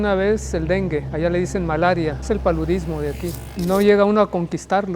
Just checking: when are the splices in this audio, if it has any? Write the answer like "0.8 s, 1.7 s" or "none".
1.1 s, 2.2 s, 3.4 s